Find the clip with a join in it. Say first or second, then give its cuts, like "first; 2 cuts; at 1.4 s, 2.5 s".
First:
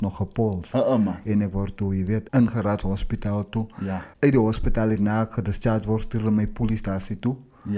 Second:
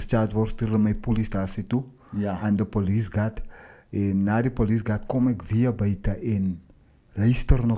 first; 2 cuts; at 2.2 s, 4.1 s